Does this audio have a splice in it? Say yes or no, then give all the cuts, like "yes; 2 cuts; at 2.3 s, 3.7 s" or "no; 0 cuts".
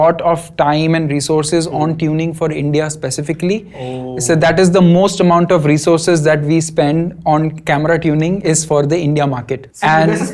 no; 0 cuts